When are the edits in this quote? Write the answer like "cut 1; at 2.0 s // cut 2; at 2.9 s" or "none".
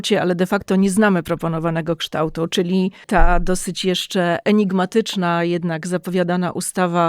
cut 1; at 3.0 s